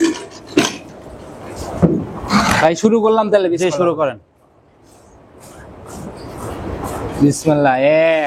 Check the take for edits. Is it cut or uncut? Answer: uncut